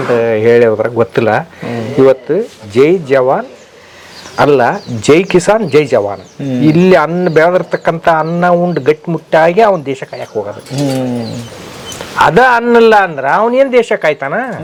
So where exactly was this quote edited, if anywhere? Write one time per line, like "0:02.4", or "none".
none